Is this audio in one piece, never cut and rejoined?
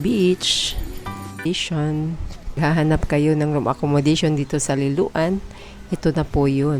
no; 1 cut; at 1.4 s

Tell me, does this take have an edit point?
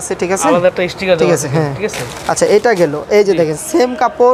no; 0 cuts

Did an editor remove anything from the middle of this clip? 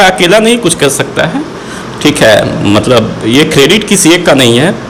no; 0 cuts

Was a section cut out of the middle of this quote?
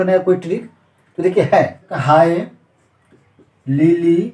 yes; 1 cut; at 1.9 s

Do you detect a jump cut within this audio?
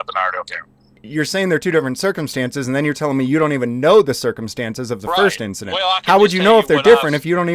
yes; 1 cut; at 1.0 s

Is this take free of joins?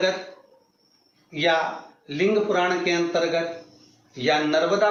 yes; 0 cuts

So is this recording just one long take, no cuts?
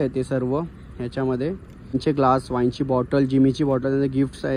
no; 1 cut; at 1.9 s

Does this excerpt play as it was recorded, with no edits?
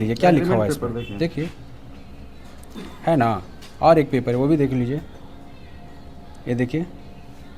yes; 0 cuts

